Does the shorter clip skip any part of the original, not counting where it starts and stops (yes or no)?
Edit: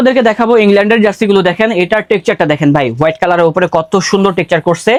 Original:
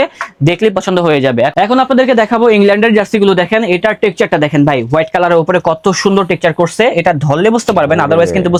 no